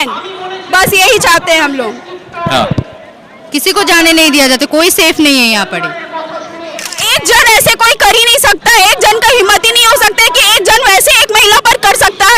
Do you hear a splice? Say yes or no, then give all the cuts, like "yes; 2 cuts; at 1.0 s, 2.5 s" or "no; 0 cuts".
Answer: yes; 1 cut; at 7.0 s